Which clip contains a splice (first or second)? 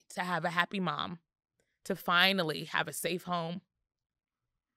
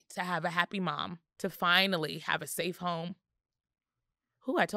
second